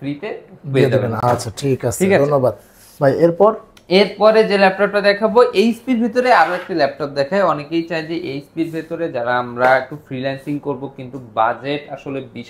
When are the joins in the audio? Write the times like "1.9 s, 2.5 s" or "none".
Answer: none